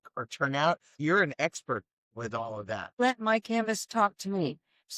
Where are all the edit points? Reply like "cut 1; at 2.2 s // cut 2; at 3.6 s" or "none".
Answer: cut 1; at 1.0 s // cut 2; at 3.0 s